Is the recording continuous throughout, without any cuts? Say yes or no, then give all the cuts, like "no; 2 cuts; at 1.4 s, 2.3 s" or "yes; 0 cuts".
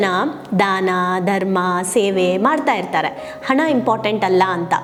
yes; 0 cuts